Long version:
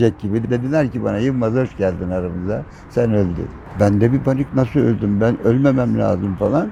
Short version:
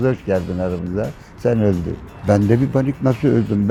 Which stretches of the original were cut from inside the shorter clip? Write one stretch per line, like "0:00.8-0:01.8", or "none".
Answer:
none